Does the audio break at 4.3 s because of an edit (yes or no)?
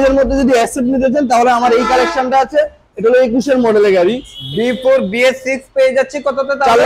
yes